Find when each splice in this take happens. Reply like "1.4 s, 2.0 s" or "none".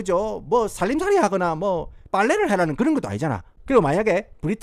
3.5 s